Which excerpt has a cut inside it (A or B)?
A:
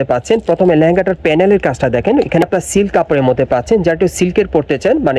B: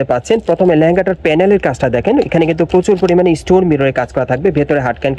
A